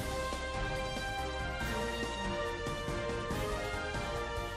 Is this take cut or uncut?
uncut